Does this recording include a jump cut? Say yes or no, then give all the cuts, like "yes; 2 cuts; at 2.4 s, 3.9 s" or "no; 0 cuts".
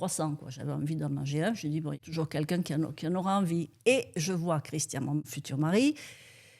yes; 2 cuts; at 2.0 s, 5.3 s